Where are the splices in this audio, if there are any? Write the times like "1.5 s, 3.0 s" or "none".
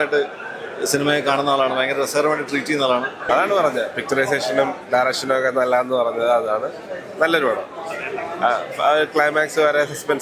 3.2 s